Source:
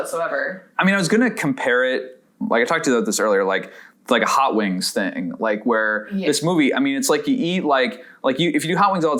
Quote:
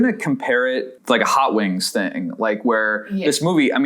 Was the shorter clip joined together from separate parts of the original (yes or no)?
yes